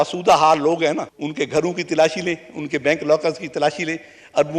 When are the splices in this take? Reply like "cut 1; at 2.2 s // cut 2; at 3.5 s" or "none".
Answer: cut 1; at 1.2 s